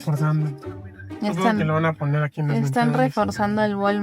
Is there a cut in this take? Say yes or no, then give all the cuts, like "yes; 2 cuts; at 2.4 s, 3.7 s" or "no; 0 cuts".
no; 0 cuts